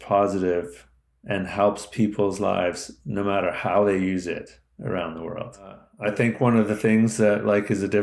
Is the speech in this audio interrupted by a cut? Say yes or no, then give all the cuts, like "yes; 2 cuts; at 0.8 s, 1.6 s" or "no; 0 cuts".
yes; 1 cut; at 5.9 s